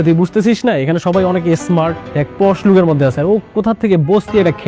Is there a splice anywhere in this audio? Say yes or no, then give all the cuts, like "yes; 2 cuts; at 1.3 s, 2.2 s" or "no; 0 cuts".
yes; 1 cut; at 2.0 s